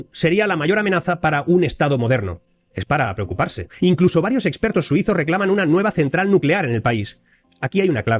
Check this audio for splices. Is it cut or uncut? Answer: uncut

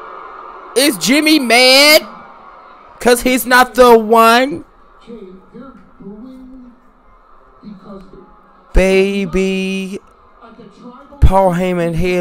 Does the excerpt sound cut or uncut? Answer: cut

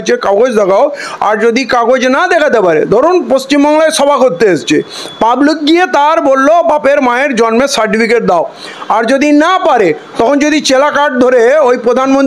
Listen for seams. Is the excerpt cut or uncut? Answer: uncut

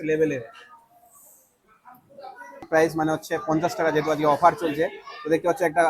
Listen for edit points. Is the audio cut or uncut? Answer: cut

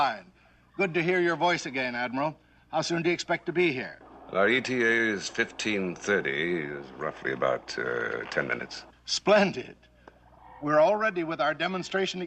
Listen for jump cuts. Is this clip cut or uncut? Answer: cut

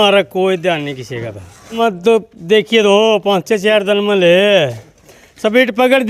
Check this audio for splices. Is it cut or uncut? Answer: cut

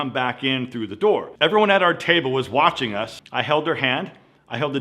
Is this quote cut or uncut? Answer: cut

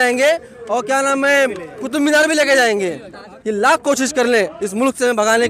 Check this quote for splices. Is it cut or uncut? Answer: cut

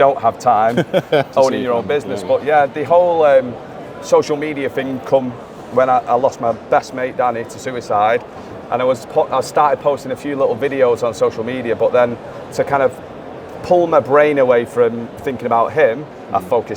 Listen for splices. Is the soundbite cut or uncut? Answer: uncut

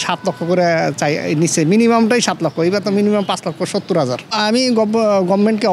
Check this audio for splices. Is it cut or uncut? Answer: cut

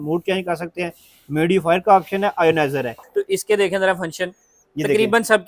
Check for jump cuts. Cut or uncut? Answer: cut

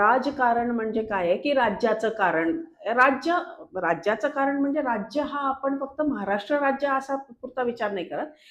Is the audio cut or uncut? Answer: uncut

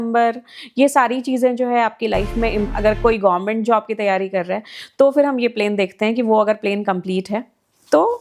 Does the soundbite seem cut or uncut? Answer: cut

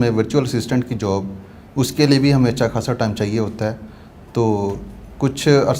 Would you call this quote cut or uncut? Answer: uncut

